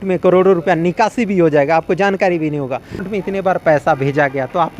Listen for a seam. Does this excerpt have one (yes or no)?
yes